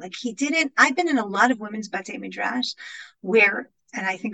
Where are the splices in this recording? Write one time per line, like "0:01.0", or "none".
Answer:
none